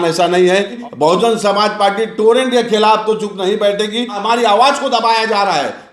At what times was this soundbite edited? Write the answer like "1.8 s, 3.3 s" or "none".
0.8 s, 4.2 s